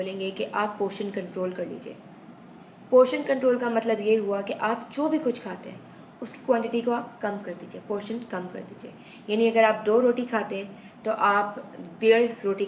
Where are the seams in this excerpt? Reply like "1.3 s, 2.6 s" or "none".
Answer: none